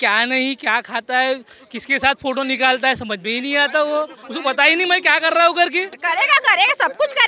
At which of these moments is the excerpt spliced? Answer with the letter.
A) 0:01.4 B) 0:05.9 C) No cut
B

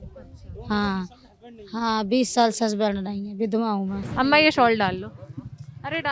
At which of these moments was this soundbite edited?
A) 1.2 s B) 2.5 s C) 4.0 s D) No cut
C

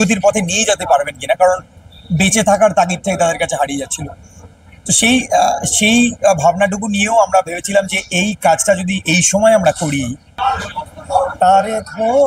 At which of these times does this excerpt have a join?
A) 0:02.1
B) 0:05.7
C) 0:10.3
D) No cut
C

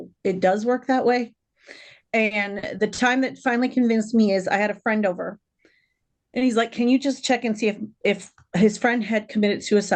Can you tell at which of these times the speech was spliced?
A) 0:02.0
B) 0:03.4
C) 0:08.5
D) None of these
D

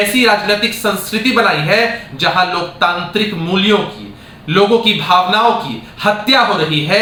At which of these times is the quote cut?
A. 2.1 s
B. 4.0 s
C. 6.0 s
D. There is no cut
D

